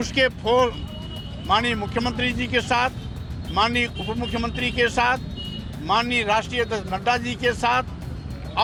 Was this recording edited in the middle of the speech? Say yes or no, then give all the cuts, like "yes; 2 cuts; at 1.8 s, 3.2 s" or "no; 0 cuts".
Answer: no; 0 cuts